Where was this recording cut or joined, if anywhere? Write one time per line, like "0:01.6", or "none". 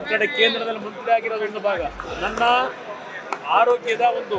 0:02.0